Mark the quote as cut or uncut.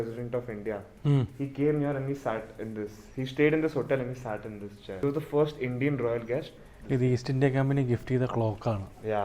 cut